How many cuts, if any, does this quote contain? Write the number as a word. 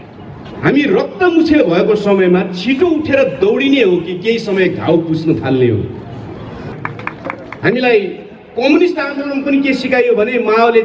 one